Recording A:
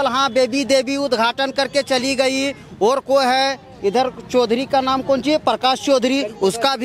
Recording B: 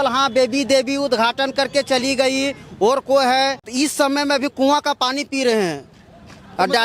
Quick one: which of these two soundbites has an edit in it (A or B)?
B